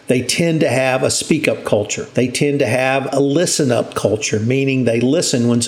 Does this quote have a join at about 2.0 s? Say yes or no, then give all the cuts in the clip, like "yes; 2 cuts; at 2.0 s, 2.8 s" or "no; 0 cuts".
yes; 1 cut; at 2.0 s